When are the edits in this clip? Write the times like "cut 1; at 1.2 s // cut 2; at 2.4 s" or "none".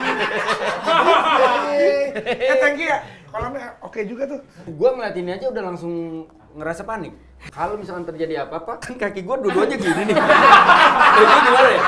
cut 1; at 4.7 s // cut 2; at 7.4 s